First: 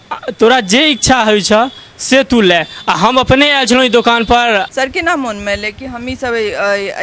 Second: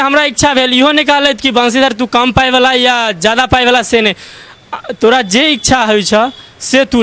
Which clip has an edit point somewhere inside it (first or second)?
first